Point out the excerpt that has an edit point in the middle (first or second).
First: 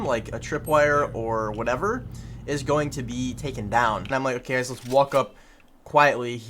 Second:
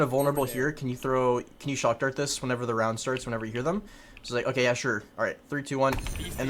first